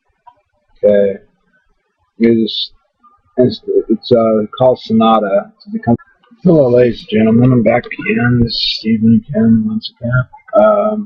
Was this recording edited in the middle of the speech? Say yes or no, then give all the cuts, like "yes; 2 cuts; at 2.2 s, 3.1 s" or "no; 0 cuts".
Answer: no; 0 cuts